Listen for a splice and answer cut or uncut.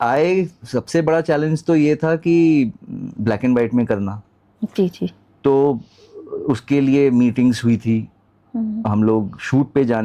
uncut